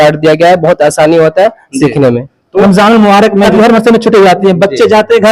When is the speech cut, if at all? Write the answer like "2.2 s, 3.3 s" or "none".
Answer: 2.4 s, 3.5 s